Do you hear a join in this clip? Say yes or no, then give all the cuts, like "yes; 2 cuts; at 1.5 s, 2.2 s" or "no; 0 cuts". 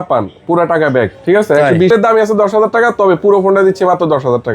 yes; 1 cut; at 1.9 s